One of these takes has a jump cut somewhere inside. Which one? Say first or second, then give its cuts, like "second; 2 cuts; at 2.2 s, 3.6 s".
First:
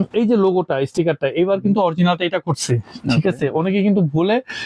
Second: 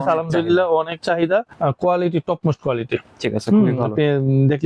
second; 1 cut; at 1.5 s